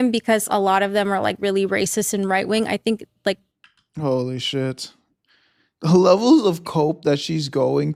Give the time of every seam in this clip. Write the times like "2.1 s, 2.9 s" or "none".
none